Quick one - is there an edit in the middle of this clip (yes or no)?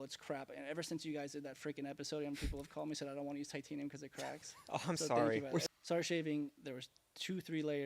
yes